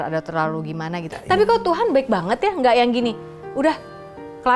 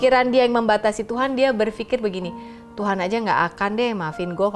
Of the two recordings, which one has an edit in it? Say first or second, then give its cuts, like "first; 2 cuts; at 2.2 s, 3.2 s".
first; 1 cut; at 1.1 s